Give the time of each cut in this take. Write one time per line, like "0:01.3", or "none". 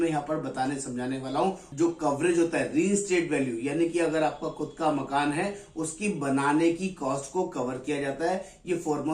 0:01.7